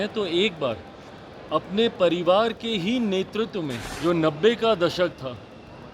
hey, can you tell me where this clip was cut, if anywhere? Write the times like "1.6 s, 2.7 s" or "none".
3.9 s